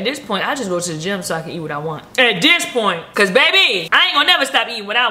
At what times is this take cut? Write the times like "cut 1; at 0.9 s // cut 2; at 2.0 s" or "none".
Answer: cut 1; at 2.0 s // cut 2; at 3.1 s // cut 3; at 3.9 s